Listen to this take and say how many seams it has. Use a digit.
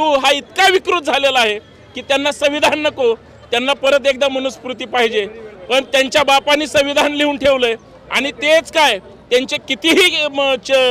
0